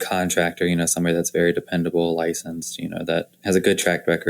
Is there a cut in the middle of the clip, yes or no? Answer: yes